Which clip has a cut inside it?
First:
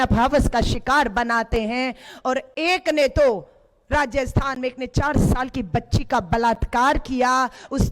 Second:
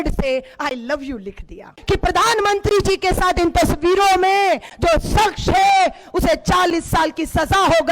second; 1 cut; at 1.8 s

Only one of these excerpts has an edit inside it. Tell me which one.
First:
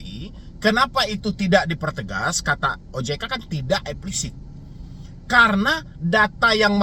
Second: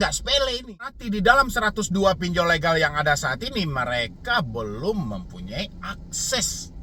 second; 1 cut; at 1.0 s

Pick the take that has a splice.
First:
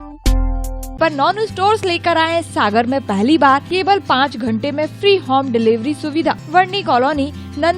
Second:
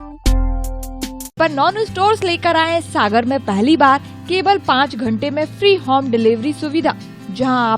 first; 3 cuts; at 0.9 s, 3.7 s, 6.4 s

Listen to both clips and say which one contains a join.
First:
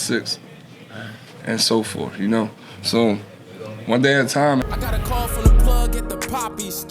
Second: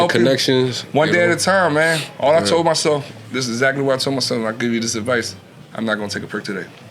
first; 1 cut; at 4.6 s

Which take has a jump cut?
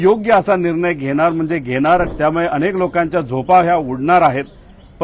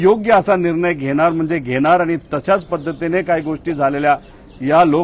first; 1 cut; at 2.1 s

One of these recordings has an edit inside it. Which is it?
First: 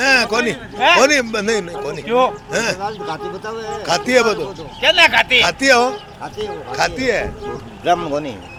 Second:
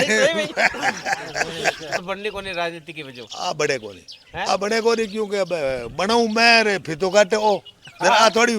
second; 1 cut; at 2.0 s

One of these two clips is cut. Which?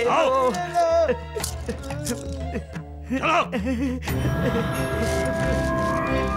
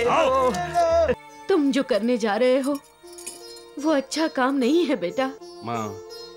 second; 2 cuts; at 1.3 s, 5.5 s

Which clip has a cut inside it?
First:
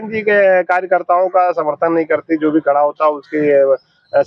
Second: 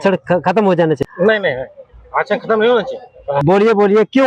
second; 2 cuts; at 1.0 s, 3.4 s

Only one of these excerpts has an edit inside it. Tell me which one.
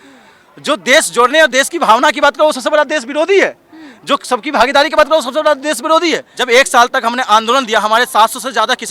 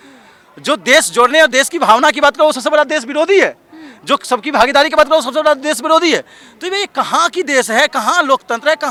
first; 1 cut; at 6.3 s

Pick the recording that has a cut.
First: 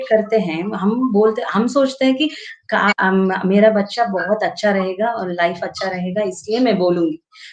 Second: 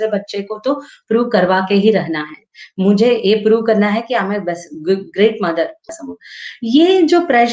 second; 1 cut; at 5.9 s

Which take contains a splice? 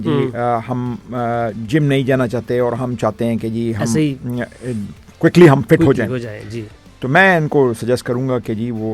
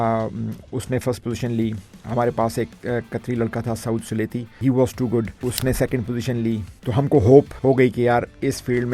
second; 4 cuts; at 4.6 s, 5.3 s, 6.7 s, 7.9 s

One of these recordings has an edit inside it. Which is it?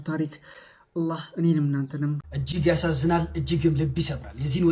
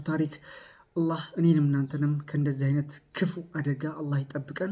first; 1 cut; at 2.3 s

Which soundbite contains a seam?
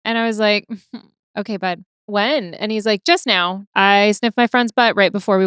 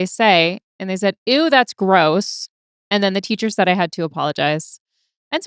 first; 3 cuts; at 1.2 s, 1.9 s, 3.6 s

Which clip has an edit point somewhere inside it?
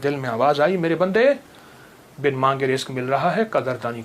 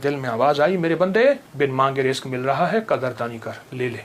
second; 1 cut; at 1.5 s

